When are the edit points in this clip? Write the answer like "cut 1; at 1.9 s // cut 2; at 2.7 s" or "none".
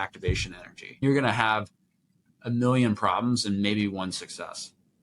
cut 1; at 1.0 s